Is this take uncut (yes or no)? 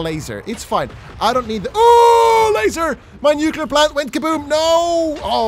yes